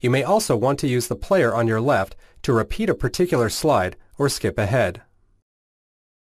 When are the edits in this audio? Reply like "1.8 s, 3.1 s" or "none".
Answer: 3.9 s